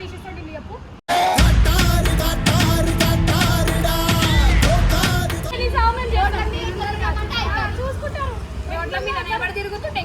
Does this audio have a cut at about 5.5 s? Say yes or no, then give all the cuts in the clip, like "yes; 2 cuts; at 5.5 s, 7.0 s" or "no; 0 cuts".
yes; 1 cut; at 5.5 s